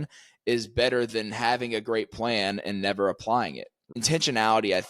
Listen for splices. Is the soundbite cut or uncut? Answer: cut